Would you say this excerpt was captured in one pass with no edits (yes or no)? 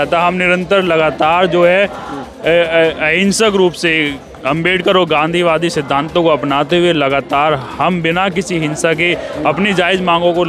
yes